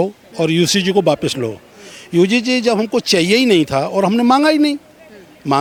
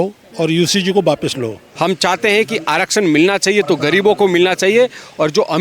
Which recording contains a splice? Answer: second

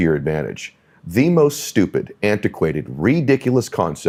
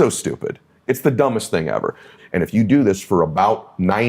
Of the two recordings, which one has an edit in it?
second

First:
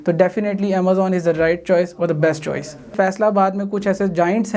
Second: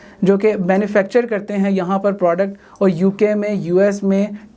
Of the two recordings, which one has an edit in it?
first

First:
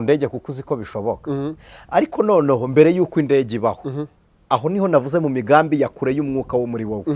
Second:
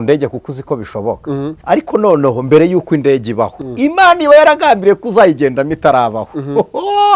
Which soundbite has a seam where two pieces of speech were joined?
second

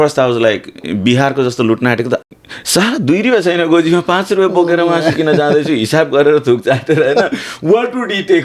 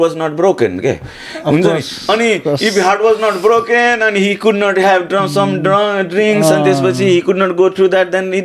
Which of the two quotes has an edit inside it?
first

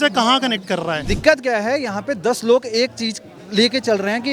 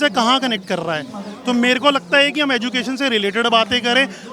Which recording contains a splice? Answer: first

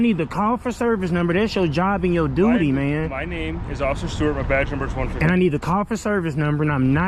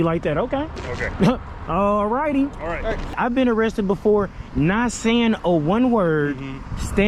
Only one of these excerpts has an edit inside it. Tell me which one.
second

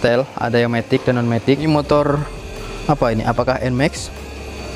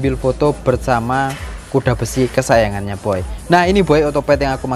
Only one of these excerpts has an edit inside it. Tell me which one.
first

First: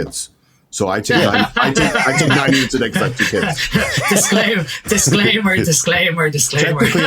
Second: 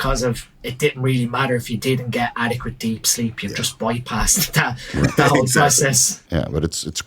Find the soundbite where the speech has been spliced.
second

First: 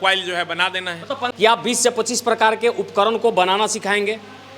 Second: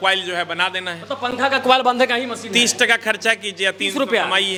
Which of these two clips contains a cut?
first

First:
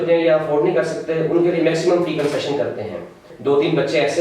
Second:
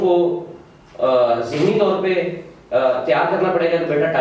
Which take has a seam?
first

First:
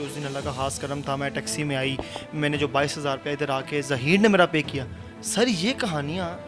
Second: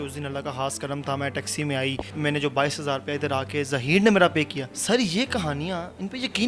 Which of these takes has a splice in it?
second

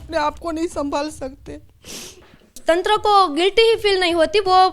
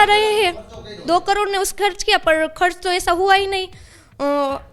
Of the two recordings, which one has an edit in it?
first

